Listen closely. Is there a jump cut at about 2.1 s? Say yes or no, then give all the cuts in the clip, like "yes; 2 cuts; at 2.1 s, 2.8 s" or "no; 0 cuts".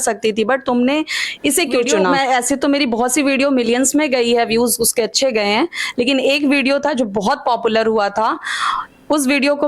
yes; 1 cut; at 2.1 s